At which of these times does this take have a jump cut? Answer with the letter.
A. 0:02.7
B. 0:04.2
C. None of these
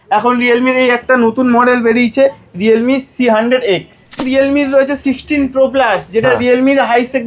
B